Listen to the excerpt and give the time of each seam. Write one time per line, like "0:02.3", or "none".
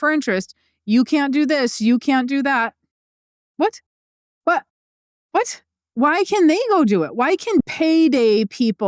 0:07.6